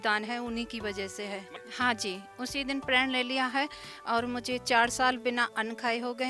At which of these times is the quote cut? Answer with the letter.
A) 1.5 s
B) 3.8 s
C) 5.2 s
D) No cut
A